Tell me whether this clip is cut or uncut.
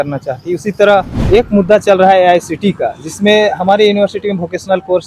cut